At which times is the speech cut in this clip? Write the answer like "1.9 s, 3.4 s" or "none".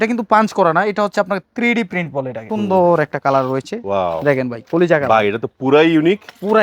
2.4 s